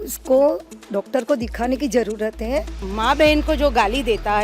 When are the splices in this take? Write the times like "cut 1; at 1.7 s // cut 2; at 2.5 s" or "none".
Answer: cut 1; at 2.9 s